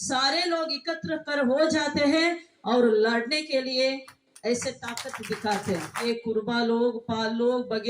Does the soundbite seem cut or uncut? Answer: cut